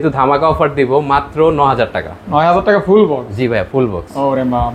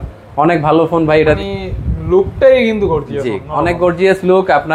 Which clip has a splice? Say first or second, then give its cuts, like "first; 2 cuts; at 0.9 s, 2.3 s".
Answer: second; 1 cut; at 1.4 s